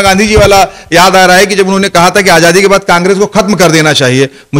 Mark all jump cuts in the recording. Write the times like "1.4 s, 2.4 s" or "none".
none